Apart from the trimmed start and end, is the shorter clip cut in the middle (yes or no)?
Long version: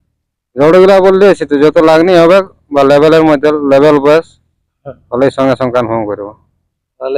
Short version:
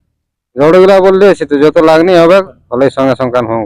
yes